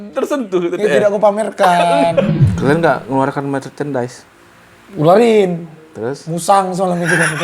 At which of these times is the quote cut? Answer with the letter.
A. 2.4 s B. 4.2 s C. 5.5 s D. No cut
A